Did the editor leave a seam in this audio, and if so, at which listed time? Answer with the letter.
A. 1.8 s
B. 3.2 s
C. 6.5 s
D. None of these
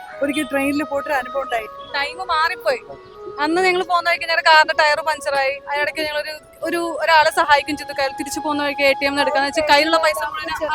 A